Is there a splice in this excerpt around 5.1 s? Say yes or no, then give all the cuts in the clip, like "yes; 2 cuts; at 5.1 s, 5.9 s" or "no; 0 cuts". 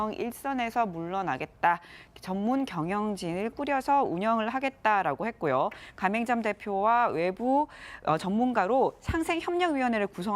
no; 1 cut; at 8.3 s